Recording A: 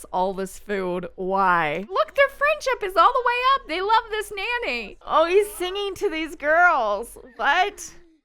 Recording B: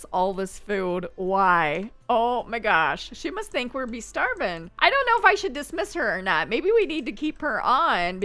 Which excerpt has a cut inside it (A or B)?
A